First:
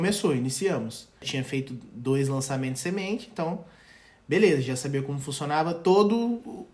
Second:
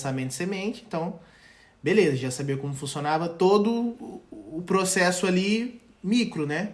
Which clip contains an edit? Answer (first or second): first